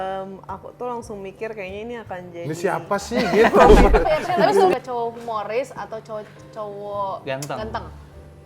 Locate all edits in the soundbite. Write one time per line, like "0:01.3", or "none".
0:04.7

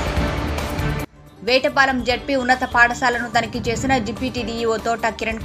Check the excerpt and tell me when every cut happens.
0:00.9

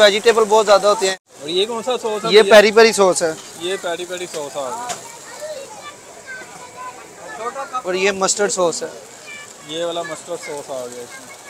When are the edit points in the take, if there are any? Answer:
0:01.2

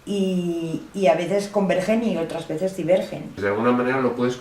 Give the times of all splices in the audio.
0:03.3

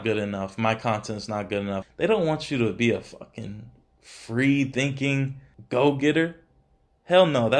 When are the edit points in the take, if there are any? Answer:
0:01.8

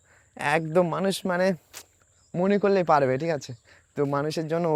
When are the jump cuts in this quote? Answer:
none

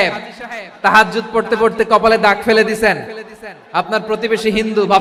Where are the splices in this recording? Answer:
none

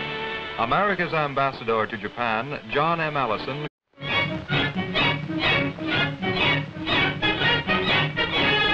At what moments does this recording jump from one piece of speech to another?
none

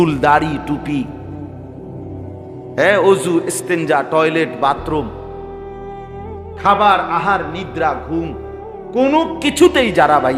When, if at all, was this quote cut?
0:05.1
0:06.6

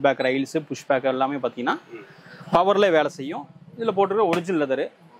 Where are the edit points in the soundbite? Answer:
none

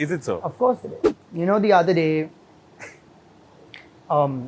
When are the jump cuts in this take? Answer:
0:00.9

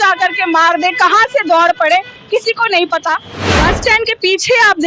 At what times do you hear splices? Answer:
0:03.3

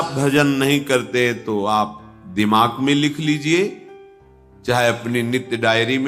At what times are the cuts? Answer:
none

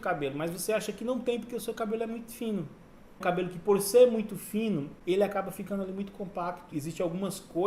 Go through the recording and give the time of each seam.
0:03.2
0:04.9
0:06.7

